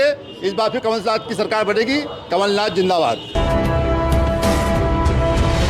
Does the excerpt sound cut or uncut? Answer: cut